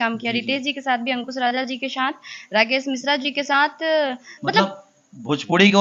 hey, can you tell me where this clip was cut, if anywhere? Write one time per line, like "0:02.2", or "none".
none